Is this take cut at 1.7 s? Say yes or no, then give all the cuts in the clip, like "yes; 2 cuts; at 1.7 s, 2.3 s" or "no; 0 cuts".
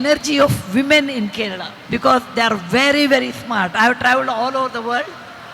yes; 1 cut; at 1.7 s